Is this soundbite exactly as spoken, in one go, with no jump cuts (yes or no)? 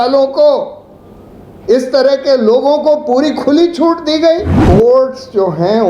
no